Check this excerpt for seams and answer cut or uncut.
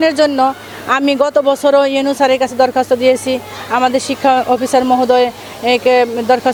uncut